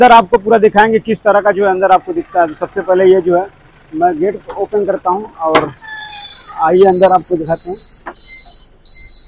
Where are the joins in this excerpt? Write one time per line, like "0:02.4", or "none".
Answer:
none